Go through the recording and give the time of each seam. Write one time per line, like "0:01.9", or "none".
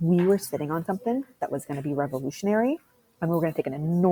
none